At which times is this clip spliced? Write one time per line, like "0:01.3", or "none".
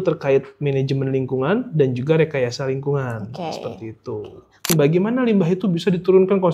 0:04.7